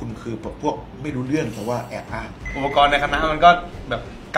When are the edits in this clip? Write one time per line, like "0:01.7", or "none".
0:02.4